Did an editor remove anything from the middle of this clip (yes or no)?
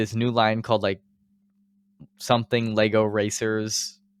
no